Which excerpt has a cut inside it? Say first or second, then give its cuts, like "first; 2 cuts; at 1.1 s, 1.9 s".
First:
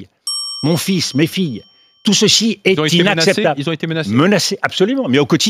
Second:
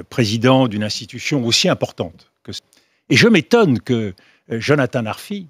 second; 1 cut; at 2.7 s